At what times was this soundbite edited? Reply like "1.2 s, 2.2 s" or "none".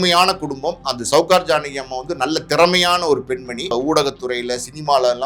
3.7 s